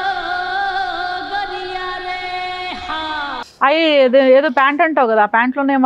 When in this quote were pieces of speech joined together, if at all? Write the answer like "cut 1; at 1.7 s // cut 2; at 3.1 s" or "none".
cut 1; at 3.5 s